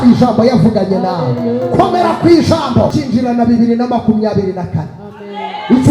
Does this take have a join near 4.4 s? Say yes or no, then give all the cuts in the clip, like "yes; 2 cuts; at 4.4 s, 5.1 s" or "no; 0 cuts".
no; 1 cut; at 2.9 s